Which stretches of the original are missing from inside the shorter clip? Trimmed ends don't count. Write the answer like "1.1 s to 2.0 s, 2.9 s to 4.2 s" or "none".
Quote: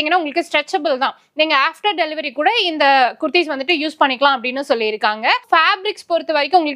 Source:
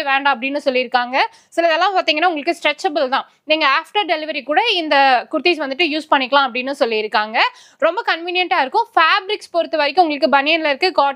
7.6 s to 8.9 s